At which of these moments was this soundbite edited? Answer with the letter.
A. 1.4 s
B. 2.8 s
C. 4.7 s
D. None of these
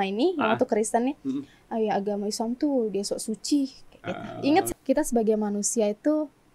C